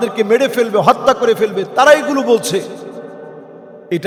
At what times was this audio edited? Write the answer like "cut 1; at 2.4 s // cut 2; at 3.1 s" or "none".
none